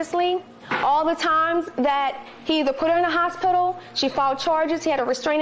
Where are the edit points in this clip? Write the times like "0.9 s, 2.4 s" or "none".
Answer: none